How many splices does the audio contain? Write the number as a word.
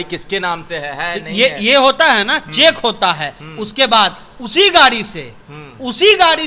zero